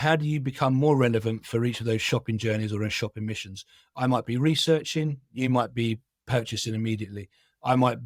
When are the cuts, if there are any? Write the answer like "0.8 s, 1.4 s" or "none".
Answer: none